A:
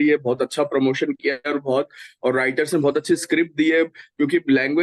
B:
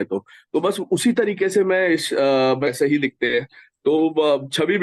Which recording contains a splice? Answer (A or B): B